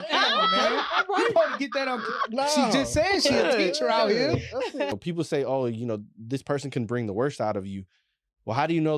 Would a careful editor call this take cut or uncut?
cut